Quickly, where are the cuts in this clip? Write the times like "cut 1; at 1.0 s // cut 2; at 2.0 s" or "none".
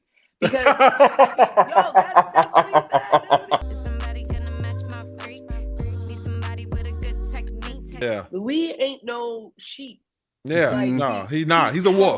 cut 1; at 8.0 s